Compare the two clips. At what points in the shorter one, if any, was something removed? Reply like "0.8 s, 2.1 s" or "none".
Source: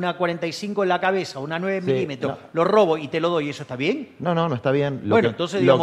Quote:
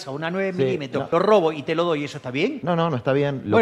1.1 s, 2.6 s

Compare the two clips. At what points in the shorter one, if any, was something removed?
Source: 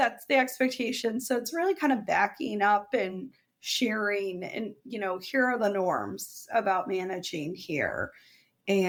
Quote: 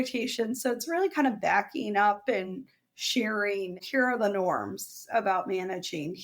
3.8 s

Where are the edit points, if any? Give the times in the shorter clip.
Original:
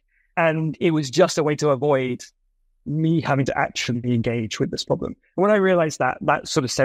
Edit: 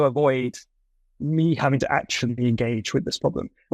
none

